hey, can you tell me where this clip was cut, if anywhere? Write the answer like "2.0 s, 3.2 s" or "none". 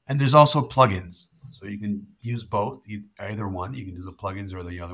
none

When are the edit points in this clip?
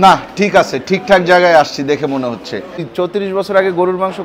2.9 s

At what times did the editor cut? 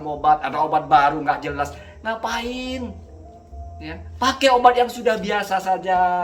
none

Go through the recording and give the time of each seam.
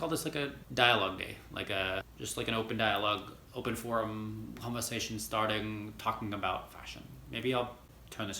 2.2 s

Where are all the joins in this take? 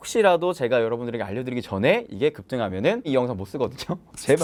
none

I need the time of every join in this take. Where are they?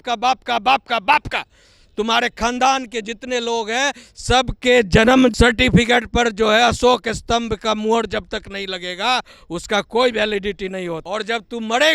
5.3 s, 11.0 s

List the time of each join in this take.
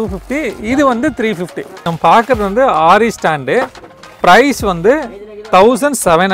1.7 s

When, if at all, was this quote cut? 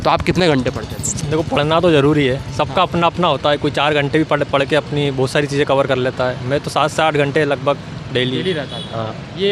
none

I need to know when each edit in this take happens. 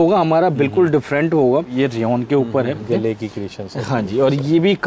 1.7 s, 2.8 s

